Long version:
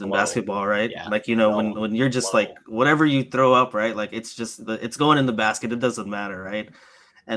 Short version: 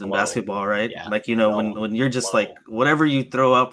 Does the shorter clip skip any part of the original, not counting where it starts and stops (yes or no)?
no